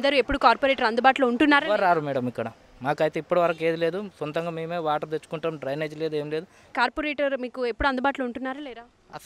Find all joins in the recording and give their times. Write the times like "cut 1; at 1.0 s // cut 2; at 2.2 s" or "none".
cut 1; at 6.7 s